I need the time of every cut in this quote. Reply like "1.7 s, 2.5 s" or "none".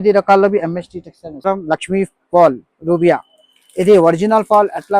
1.5 s